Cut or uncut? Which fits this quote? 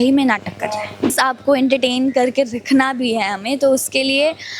cut